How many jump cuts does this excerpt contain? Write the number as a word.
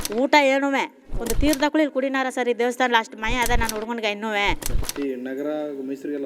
one